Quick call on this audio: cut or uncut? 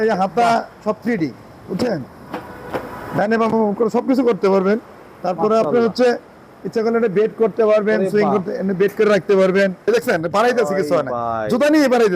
cut